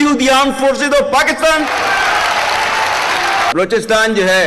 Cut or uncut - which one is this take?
cut